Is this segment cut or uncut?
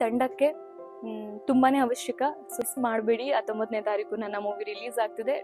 cut